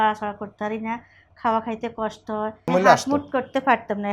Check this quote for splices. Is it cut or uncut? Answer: cut